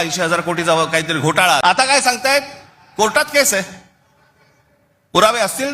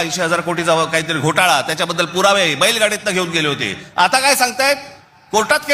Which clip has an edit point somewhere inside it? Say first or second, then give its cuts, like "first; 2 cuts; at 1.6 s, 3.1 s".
first; 1 cut; at 1.6 s